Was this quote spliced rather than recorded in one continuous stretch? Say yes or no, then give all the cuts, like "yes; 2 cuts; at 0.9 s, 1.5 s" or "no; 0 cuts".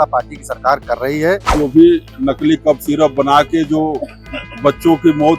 yes; 1 cut; at 1.5 s